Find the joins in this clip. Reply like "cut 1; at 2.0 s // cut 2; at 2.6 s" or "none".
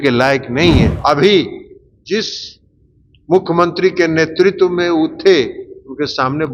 cut 1; at 1.0 s